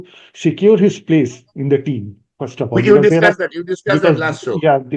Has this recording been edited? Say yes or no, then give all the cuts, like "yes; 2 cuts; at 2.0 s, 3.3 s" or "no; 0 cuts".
no; 0 cuts